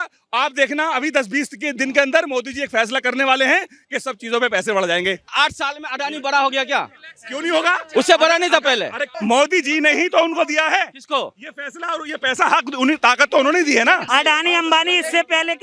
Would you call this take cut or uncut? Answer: cut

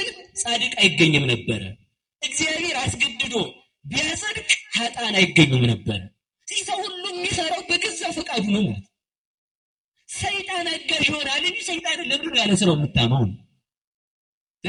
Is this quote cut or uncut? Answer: uncut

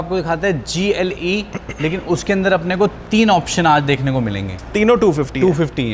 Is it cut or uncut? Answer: cut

